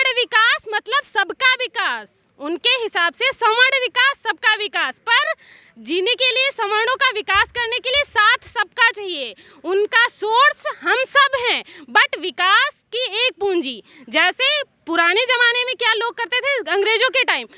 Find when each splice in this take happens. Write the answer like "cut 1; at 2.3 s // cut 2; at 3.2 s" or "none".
none